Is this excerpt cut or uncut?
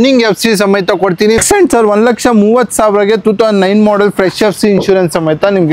cut